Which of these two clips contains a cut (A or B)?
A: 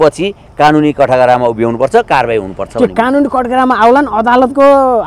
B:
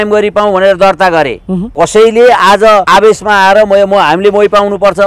B